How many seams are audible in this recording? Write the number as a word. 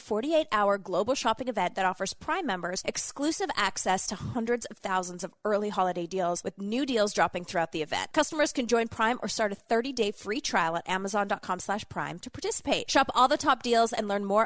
four